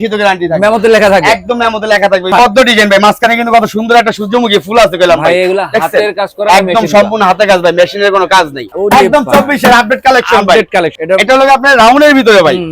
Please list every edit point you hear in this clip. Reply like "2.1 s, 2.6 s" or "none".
2.3 s, 8.7 s, 10.9 s